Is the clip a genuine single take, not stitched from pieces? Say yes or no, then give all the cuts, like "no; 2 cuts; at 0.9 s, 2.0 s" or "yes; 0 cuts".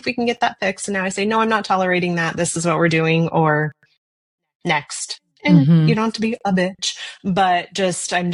yes; 0 cuts